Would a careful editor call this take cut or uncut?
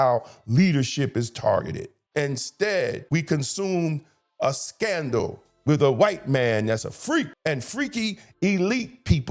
cut